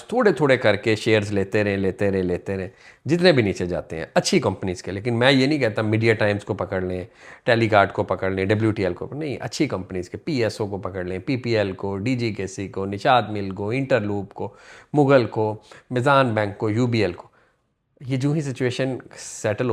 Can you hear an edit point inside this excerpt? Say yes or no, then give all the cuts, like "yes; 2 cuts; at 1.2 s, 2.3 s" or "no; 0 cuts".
no; 0 cuts